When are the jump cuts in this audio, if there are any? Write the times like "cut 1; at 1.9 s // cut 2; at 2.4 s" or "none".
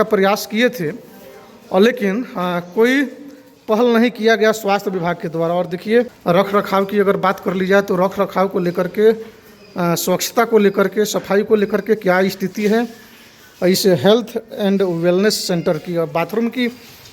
cut 1; at 6.1 s